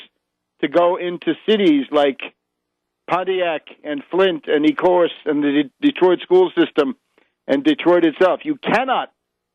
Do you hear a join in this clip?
yes; 1 cut; at 8.0 s

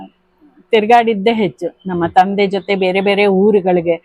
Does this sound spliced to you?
no; 0 cuts

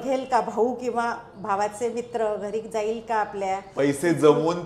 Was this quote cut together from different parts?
no; 0 cuts

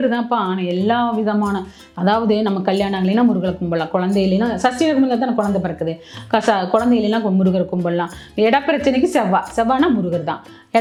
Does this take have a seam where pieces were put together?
no; 0 cuts

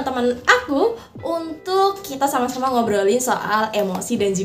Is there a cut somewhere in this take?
no; 0 cuts

